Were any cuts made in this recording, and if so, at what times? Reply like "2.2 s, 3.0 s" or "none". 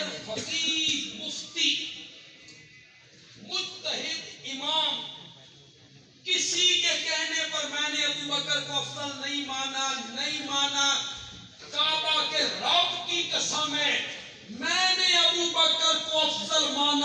none